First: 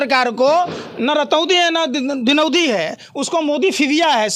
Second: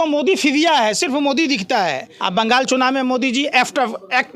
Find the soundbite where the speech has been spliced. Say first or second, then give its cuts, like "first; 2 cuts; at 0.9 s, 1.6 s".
second; 1 cut; at 2.1 s